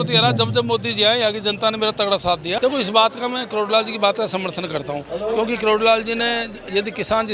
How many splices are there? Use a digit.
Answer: 1